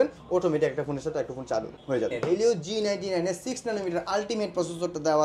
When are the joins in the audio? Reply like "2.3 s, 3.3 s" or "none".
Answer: 2.2 s